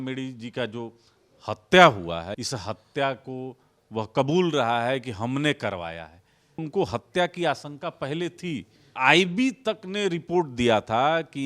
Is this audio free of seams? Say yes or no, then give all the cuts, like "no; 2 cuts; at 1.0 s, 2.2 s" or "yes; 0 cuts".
no; 3 cuts; at 2.3 s, 6.6 s, 8.9 s